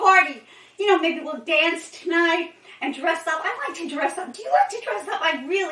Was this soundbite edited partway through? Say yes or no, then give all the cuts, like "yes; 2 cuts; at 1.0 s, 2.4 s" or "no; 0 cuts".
no; 0 cuts